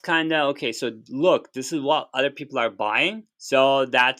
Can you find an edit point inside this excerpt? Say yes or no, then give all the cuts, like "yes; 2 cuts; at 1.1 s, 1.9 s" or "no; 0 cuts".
yes; 1 cut; at 3.3 s